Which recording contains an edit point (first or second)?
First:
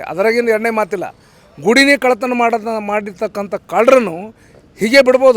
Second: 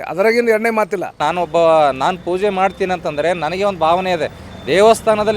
second